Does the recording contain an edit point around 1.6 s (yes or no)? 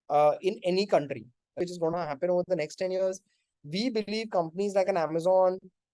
yes